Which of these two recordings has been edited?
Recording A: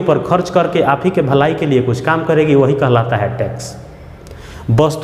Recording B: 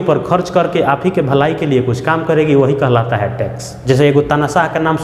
B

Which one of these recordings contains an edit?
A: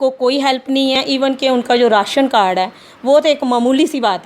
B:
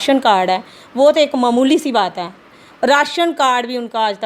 A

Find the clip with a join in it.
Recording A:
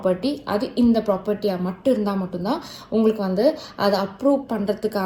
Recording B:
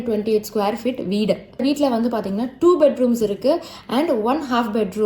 B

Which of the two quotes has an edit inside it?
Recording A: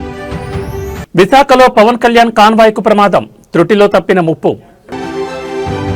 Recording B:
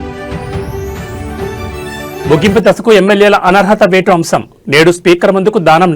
B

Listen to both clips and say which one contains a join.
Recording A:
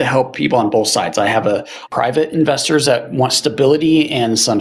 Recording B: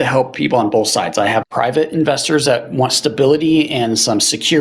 B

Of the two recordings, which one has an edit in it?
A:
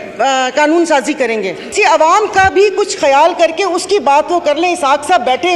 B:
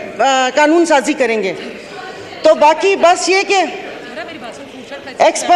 A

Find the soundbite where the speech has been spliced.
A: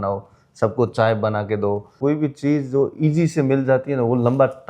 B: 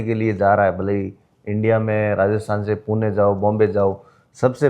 A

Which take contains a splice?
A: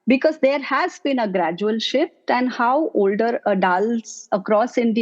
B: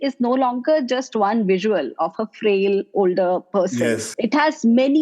B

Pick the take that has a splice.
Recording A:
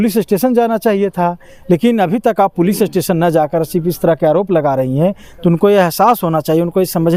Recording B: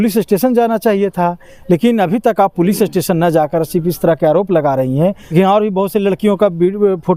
B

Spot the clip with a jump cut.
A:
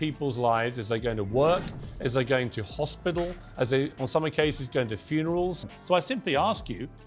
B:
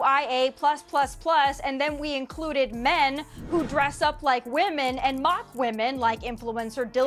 A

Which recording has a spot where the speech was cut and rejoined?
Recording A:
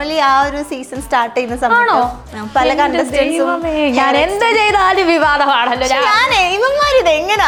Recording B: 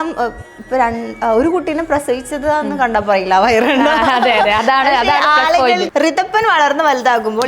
B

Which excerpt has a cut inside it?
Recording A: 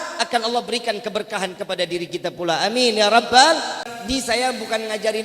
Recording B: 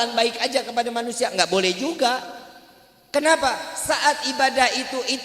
A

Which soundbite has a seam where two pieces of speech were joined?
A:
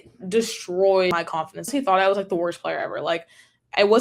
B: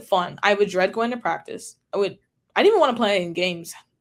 A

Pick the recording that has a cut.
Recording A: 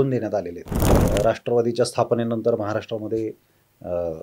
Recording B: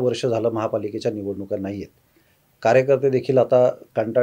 A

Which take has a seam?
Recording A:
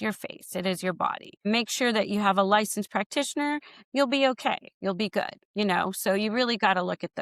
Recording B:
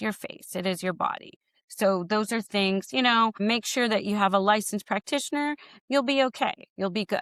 A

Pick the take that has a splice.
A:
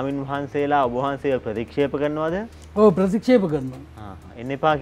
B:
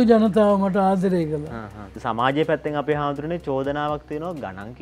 B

